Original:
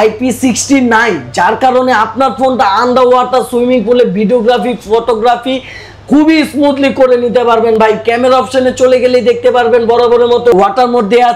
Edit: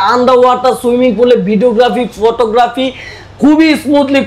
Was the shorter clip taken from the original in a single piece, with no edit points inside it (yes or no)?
yes